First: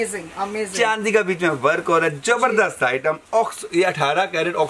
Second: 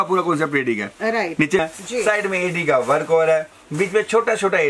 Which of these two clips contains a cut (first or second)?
second